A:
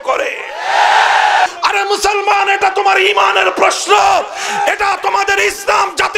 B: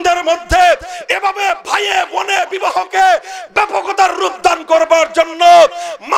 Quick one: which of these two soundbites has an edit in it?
A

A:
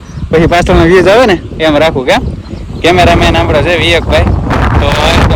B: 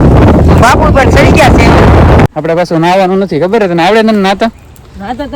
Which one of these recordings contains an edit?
B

